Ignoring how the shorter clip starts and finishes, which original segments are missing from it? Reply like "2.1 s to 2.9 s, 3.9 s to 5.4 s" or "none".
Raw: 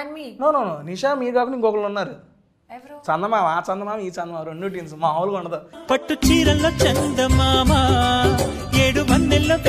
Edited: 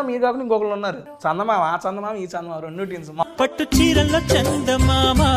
2.2 s to 2.9 s, 5.1 s to 5.7 s